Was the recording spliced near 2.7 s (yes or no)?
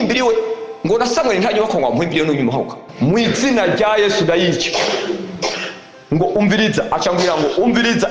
yes